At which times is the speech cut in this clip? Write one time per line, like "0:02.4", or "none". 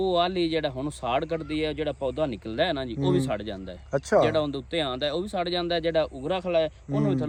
none